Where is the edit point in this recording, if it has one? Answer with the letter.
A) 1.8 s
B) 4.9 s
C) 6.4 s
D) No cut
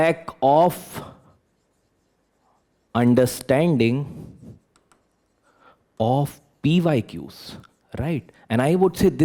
D